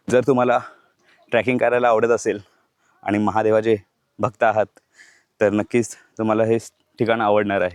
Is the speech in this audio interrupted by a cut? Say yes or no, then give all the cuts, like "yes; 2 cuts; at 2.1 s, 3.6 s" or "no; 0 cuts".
no; 0 cuts